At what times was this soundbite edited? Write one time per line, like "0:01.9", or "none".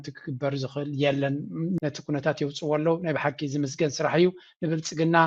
0:01.8